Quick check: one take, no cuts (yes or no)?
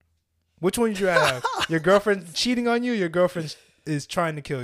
yes